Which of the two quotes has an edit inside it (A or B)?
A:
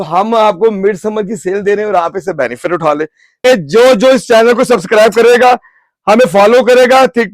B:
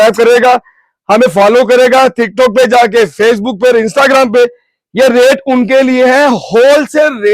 A